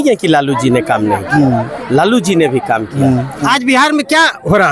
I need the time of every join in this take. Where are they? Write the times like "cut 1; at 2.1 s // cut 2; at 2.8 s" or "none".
cut 1; at 3.4 s